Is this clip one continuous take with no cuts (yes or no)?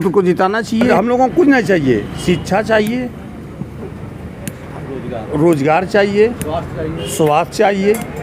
no